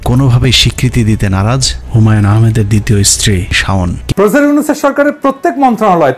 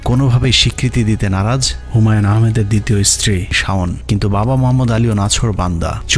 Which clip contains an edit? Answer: first; 1 cut; at 4.0 s

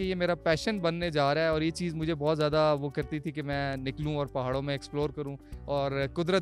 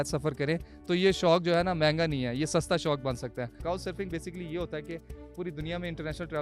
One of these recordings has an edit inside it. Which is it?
second; 1 cut; at 3.6 s

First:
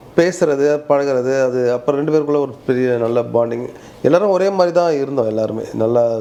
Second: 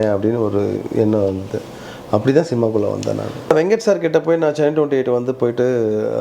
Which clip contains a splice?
second; 1 cut; at 3.5 s

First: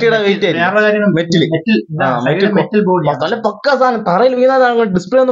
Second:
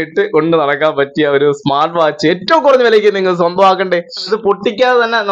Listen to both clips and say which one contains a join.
second; 1 cut; at 4.2 s

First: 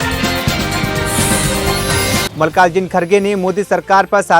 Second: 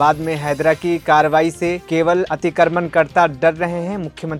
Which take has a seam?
first; 1 cut; at 2.3 s

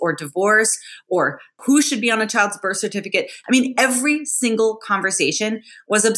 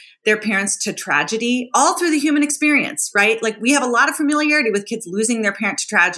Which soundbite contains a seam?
first; 2 cuts; at 1.6 s, 3.4 s

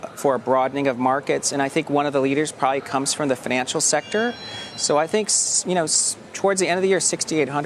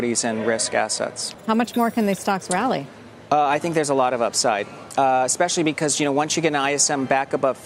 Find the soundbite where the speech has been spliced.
second; 1 cut; at 4.8 s

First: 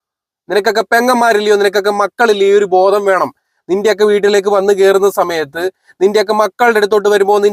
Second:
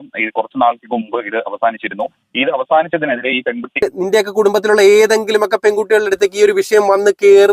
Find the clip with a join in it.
second; 1 cut; at 4.0 s

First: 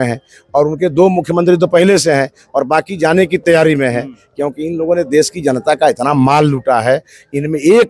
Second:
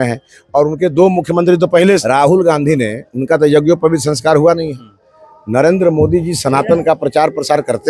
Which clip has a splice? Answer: second; 1 cut; at 2.0 s

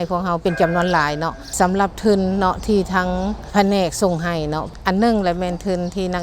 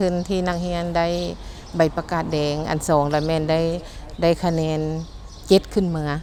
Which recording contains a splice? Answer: first; 3 cuts; at 1.4 s, 3.5 s, 4.7 s

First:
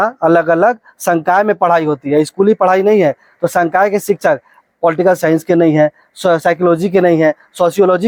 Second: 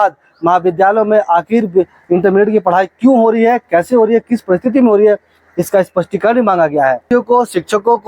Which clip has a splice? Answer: second; 1 cut; at 7.0 s

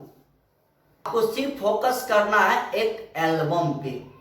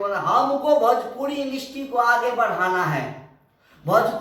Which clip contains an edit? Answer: first; 1 cut; at 1.1 s

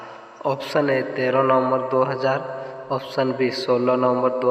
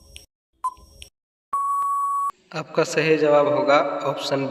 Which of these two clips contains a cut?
second; 1 cut; at 2.4 s

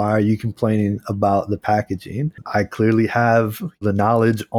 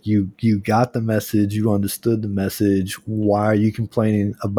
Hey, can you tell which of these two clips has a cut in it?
first; 2 cuts; at 2.3 s, 3.8 s

